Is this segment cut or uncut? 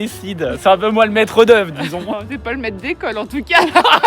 cut